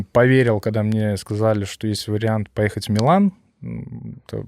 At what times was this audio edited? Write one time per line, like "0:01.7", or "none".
none